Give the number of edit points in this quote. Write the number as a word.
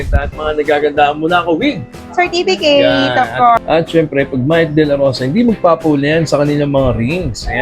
one